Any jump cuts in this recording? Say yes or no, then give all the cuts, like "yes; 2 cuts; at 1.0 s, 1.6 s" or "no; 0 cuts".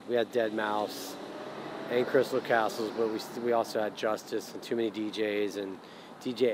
no; 0 cuts